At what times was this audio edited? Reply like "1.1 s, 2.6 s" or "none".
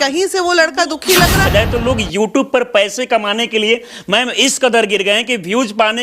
1.5 s